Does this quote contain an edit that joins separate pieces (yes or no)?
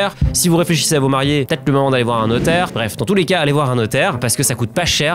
yes